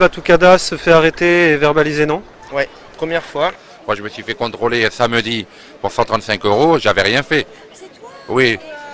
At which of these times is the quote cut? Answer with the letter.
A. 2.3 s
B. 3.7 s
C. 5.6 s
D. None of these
B